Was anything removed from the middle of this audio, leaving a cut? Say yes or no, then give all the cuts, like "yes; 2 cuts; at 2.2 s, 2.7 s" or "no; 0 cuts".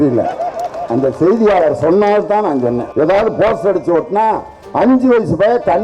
yes; 1 cut; at 2.9 s